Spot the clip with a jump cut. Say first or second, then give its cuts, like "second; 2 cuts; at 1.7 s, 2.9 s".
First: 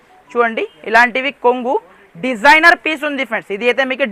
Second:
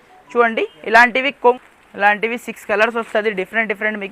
second; 1 cut; at 1.6 s